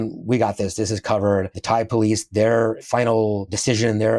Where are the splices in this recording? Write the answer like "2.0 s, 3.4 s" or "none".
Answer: none